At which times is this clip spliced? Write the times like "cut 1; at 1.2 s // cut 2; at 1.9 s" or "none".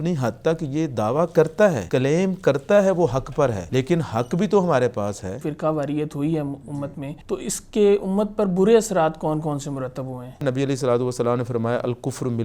cut 1; at 1.8 s // cut 2; at 3.6 s // cut 3; at 5.5 s // cut 4; at 7.1 s // cut 5; at 10.4 s